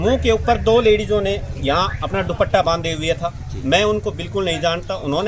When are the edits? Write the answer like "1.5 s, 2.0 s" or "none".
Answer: none